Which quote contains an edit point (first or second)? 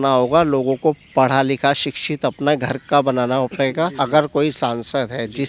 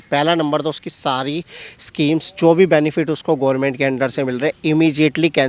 first